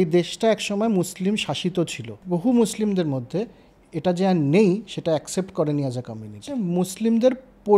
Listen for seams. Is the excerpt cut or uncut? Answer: cut